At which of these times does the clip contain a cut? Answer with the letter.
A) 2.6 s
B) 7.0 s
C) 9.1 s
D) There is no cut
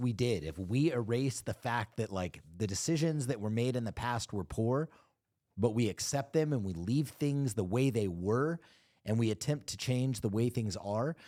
D